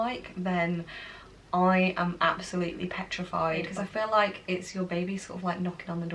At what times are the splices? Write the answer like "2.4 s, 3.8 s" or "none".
3.7 s